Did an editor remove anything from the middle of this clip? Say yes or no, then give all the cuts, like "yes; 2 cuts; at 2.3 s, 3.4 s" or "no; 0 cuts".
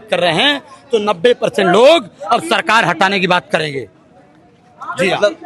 no; 0 cuts